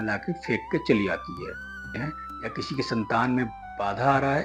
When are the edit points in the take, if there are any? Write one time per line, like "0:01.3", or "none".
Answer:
0:01.9